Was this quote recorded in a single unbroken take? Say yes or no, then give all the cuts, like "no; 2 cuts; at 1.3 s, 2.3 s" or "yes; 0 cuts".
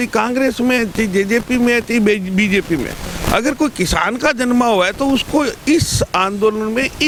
yes; 0 cuts